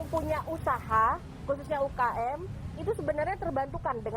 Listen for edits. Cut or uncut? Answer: uncut